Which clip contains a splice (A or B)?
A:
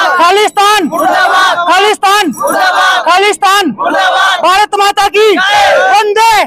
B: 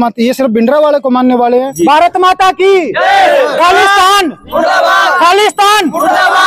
B